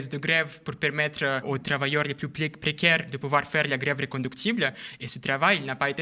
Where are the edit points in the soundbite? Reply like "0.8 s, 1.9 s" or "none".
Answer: 1.4 s